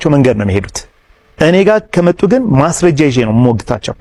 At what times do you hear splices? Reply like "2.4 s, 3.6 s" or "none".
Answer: none